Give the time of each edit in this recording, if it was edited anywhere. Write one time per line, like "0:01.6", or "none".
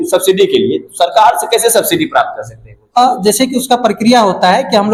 none